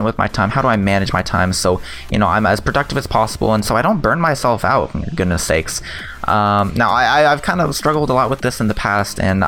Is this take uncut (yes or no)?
yes